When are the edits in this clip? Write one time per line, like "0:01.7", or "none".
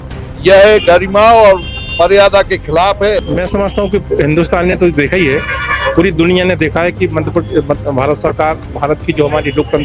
0:03.2